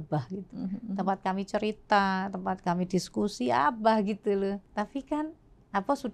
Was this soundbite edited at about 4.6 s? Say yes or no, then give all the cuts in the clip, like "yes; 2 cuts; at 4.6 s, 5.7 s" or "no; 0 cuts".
yes; 1 cut; at 4.6 s